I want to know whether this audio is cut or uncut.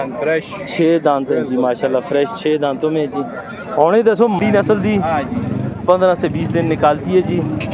cut